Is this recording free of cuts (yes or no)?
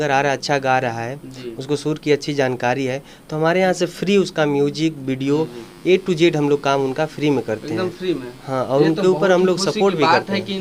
yes